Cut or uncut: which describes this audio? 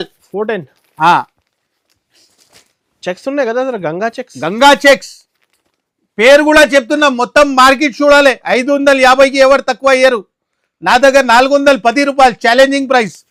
uncut